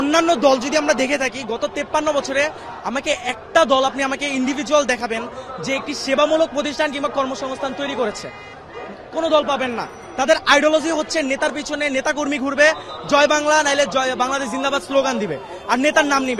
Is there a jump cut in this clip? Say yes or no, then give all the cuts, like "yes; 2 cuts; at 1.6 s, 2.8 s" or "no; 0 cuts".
no; 0 cuts